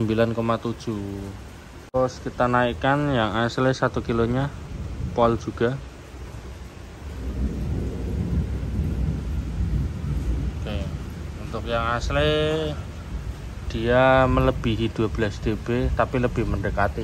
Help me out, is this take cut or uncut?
cut